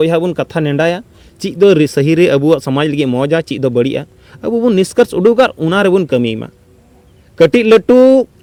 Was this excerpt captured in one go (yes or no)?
yes